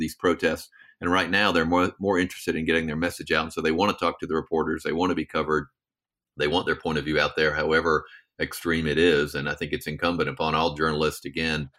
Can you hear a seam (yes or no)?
no